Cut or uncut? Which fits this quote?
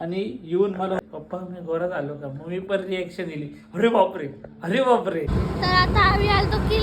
cut